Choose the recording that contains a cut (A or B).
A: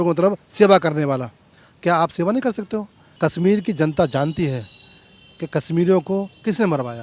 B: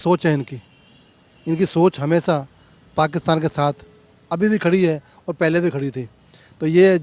A